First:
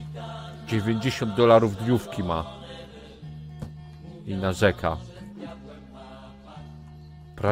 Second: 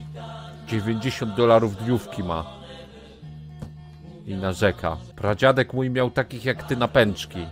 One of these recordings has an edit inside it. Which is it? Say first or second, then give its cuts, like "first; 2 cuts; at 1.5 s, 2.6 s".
second; 1 cut; at 5.1 s